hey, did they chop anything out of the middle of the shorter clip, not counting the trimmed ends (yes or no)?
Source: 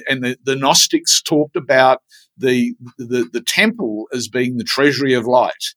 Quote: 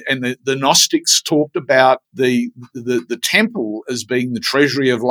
yes